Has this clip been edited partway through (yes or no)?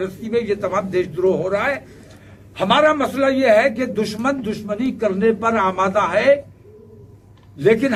no